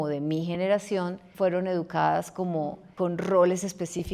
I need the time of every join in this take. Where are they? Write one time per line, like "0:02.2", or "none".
0:01.2
0:02.9